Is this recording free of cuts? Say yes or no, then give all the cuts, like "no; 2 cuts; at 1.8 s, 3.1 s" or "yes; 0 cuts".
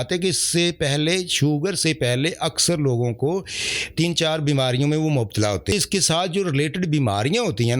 no; 1 cut; at 5.7 s